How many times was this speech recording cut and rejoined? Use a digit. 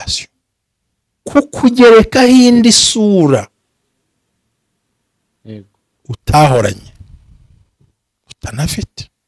1